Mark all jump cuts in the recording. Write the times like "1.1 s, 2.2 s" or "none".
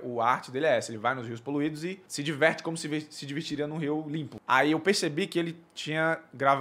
2.1 s, 4.3 s